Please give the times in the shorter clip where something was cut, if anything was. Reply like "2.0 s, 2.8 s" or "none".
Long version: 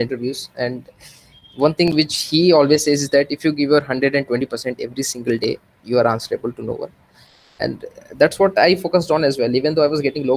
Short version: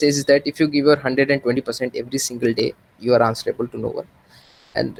none